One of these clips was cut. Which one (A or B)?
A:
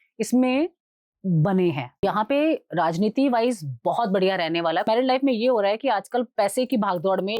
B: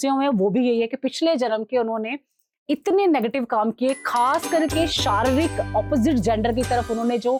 A